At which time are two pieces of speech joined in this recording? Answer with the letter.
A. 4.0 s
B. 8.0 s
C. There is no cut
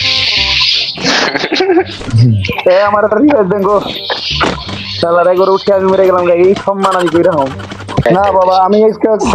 B